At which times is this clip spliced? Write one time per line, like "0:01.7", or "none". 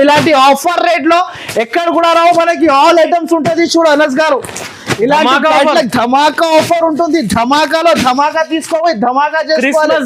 none